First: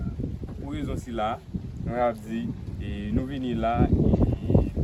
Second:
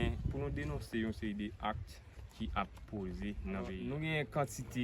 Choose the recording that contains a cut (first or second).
second